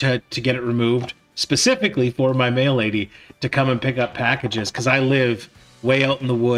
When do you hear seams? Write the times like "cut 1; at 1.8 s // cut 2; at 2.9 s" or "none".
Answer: none